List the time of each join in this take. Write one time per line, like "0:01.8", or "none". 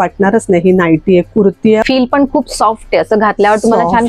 0:01.8